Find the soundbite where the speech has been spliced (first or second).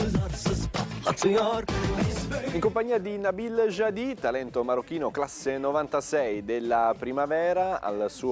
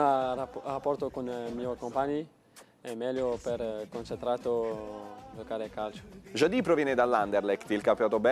first